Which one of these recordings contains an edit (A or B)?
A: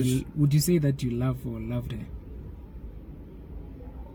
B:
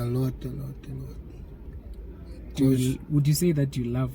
B